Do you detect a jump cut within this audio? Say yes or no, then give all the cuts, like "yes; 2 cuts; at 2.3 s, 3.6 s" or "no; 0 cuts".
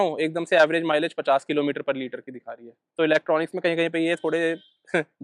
no; 0 cuts